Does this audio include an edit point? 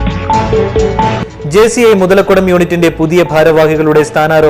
yes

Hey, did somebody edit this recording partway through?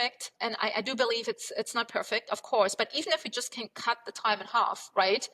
no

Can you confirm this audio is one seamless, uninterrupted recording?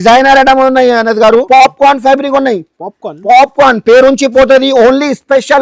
no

